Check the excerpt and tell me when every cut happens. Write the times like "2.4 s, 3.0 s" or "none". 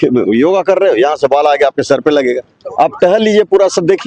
none